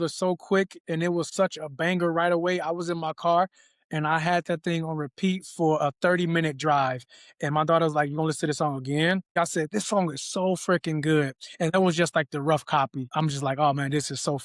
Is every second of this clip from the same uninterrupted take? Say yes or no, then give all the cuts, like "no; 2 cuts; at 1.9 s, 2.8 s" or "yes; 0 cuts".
no; 2 cuts; at 9.4 s, 13.0 s